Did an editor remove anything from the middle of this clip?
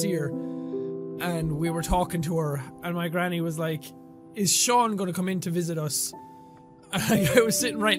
no; 0 cuts

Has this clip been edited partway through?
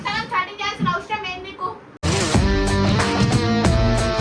no; 0 cuts

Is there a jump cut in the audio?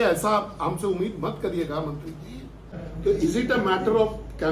yes; 1 cut; at 2.7 s

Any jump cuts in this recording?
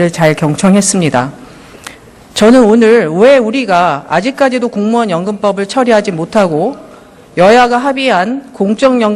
no; 0 cuts

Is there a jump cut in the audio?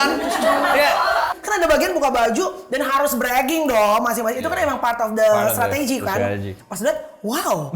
yes; 2 cuts; at 1.3 s, 6.6 s

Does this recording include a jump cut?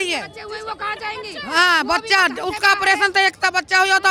no; 0 cuts

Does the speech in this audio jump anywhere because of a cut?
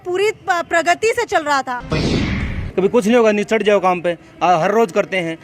yes; 1 cut; at 2.2 s

